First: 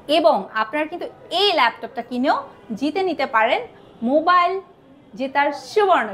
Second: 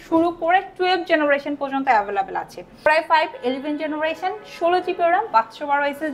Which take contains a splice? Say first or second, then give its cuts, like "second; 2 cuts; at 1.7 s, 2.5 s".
second; 1 cut; at 2.9 s